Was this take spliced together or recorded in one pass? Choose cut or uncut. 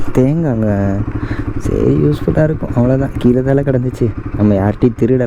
uncut